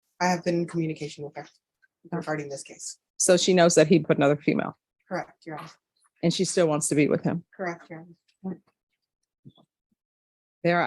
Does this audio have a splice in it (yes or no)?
yes